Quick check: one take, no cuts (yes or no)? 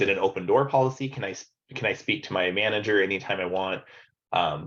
yes